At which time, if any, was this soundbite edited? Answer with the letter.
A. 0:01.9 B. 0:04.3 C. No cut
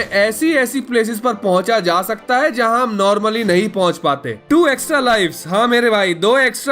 B